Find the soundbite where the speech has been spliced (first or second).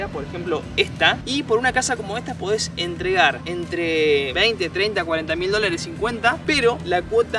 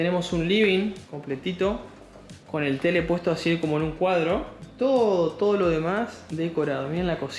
first